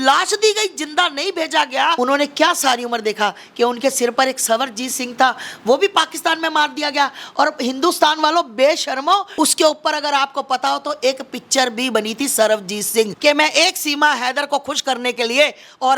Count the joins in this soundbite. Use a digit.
3